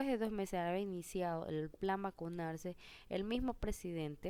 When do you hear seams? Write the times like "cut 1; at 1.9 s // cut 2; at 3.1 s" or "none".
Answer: none